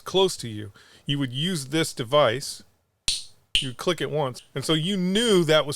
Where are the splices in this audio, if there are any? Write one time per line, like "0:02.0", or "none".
0:04.4